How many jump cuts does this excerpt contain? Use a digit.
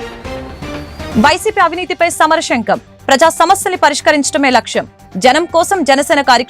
1